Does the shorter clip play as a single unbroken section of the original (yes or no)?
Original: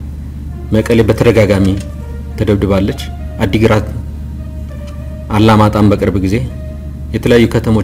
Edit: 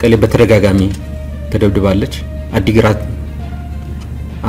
yes